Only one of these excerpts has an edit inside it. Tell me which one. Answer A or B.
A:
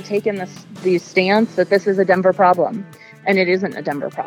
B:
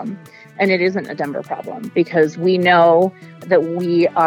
B